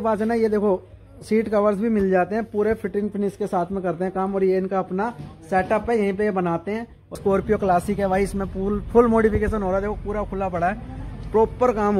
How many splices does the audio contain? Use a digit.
1